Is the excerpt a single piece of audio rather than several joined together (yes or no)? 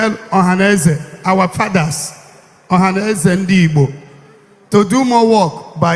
yes